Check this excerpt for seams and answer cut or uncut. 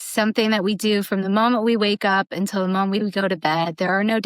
uncut